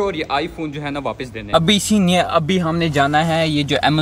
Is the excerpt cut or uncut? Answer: cut